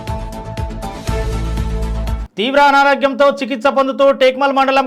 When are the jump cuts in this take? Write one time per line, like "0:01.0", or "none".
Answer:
none